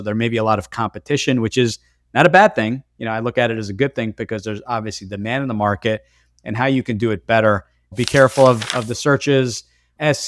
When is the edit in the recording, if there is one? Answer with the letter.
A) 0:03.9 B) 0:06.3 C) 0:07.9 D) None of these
C